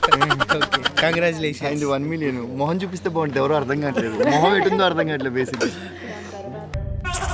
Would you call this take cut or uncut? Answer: uncut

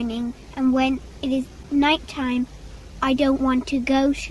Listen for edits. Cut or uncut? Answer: uncut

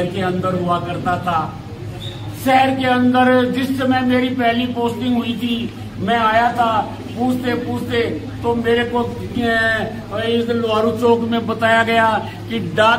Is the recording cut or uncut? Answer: uncut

